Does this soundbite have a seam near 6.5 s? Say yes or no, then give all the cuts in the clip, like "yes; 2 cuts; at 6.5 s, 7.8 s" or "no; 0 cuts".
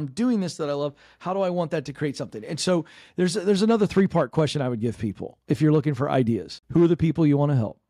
yes; 1 cut; at 6.5 s